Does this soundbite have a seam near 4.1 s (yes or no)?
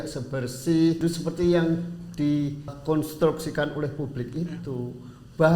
no